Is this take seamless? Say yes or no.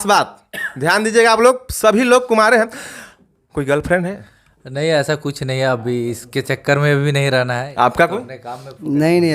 no